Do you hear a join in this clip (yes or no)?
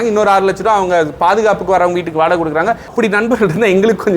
yes